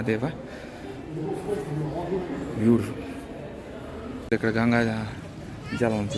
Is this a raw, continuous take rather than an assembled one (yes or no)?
no